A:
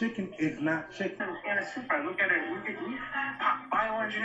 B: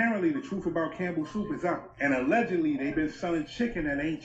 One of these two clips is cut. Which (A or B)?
A